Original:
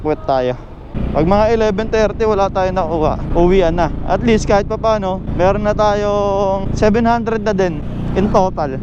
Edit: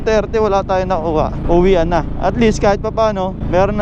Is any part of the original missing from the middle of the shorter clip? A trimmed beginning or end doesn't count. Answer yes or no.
no